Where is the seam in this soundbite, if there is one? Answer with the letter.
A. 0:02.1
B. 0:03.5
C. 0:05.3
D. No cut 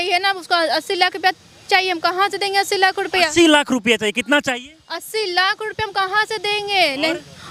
D